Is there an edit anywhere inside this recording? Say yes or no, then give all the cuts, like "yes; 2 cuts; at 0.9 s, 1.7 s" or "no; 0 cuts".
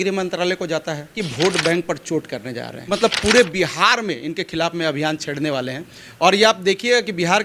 yes; 2 cuts; at 1.1 s, 2.7 s